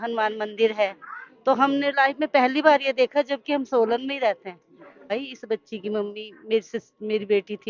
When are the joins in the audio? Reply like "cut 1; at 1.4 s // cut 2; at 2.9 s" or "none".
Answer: cut 1; at 5.1 s